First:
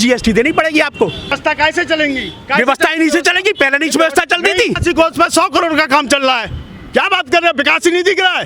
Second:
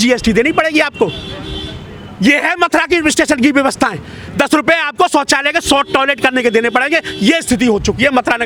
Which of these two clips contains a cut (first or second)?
first